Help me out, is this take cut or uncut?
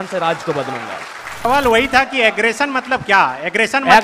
cut